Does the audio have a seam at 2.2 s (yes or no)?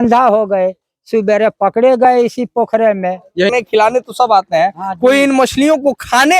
no